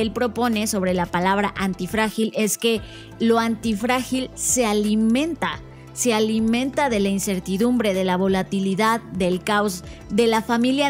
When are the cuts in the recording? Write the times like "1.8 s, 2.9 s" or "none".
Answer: none